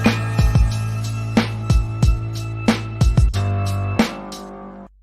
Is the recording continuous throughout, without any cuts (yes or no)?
yes